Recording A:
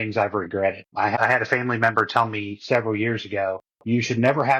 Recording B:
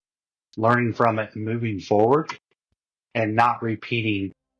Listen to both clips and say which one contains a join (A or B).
A